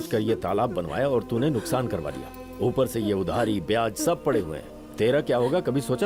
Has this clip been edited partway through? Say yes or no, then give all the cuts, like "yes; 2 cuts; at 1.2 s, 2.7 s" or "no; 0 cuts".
no; 0 cuts